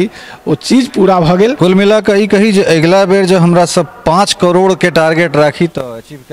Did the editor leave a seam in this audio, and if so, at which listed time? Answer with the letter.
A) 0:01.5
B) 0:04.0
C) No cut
A